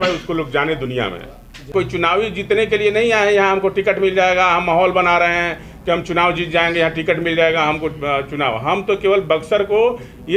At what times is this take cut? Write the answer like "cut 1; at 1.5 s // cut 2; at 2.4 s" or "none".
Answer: cut 1; at 1.7 s

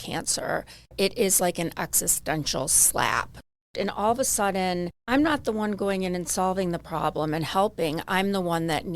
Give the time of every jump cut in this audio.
cut 1; at 0.9 s // cut 2; at 3.5 s // cut 3; at 4.9 s

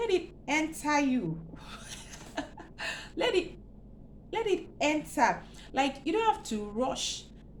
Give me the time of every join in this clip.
none

